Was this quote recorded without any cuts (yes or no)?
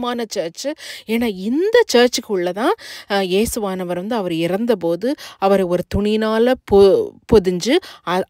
yes